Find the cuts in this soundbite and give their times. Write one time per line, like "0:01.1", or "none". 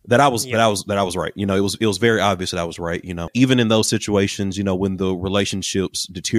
0:03.3